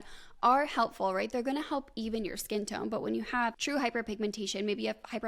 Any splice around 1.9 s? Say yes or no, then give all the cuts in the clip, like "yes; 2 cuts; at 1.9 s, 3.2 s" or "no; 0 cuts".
no; 1 cut; at 3.6 s